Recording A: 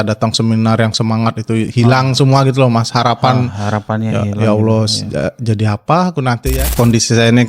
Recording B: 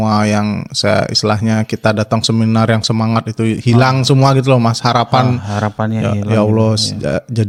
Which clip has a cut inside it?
A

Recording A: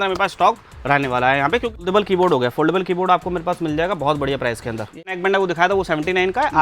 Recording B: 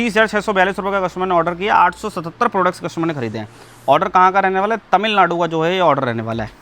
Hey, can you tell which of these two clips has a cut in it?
A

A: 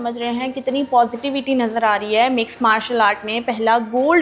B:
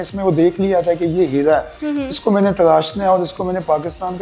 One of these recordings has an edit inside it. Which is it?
B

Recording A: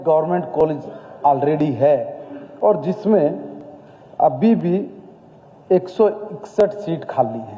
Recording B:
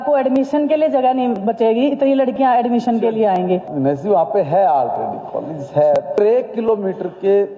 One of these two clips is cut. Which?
B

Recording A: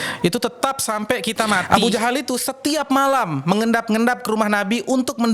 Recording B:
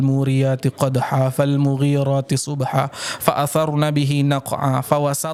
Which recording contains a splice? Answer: A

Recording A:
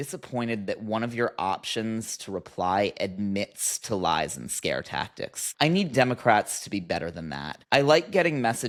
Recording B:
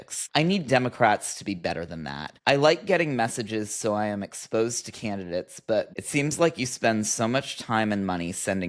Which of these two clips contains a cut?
B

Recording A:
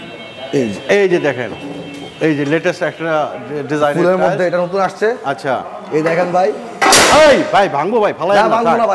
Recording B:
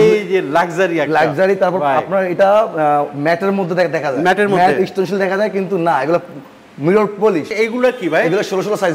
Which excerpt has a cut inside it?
B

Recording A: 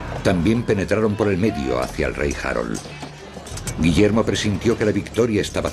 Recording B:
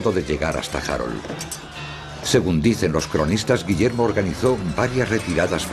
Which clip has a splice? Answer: B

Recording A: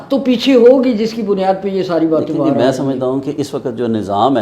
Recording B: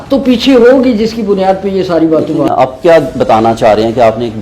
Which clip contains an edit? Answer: B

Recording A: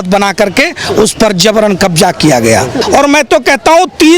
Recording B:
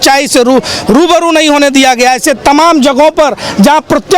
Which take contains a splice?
A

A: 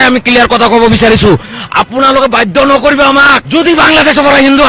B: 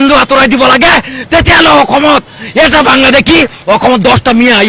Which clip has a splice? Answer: A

